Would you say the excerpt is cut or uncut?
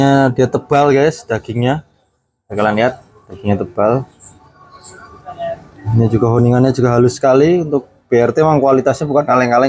uncut